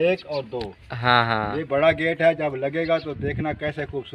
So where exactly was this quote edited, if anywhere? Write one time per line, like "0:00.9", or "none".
none